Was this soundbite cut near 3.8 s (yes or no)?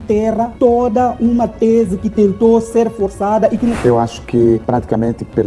yes